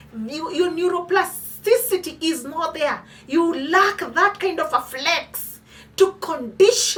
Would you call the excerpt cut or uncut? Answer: uncut